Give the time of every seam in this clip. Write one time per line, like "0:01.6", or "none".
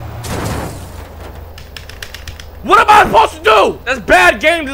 none